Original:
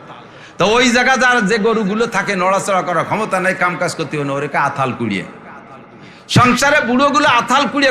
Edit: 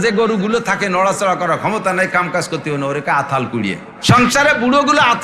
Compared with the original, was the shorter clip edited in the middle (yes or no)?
yes